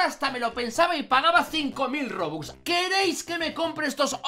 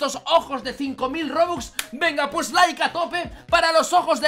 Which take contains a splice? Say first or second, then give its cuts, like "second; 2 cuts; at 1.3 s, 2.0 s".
first; 1 cut; at 2.4 s